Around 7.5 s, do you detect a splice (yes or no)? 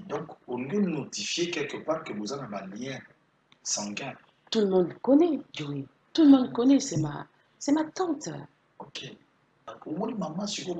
no